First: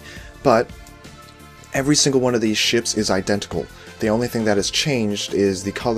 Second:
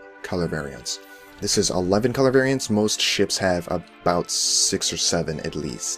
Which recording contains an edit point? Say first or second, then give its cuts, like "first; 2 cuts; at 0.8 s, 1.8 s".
second; 1 cut; at 2.5 s